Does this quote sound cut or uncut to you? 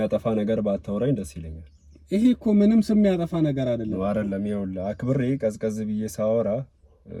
uncut